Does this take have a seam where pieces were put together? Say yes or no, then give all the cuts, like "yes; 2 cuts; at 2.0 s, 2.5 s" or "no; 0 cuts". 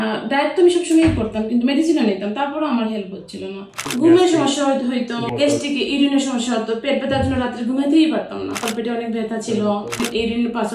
yes; 3 cuts; at 3.7 s, 8.6 s, 9.9 s